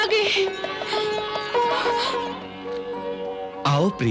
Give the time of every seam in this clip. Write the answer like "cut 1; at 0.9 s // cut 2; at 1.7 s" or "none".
cut 1; at 2.2 s